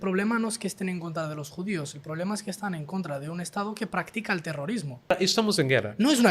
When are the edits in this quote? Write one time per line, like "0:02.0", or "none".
0:05.1